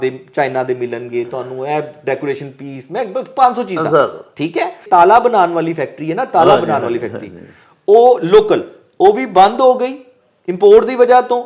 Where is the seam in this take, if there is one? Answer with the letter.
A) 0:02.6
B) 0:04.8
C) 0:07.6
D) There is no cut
B